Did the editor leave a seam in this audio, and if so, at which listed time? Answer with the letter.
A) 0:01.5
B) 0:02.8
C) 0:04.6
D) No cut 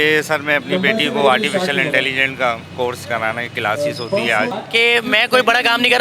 C